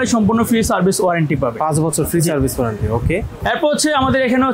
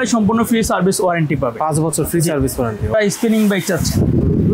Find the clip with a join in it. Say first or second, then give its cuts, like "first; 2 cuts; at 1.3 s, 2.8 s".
second; 1 cut; at 2.9 s